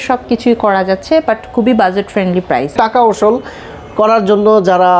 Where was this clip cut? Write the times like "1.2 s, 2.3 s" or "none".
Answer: 2.8 s